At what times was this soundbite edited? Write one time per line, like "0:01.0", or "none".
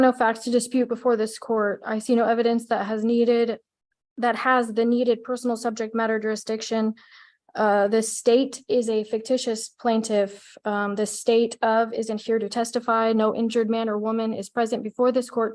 none